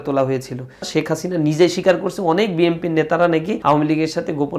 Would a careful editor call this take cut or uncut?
cut